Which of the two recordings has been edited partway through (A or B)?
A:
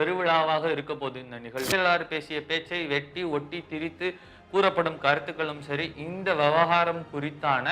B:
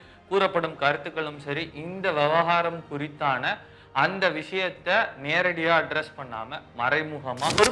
A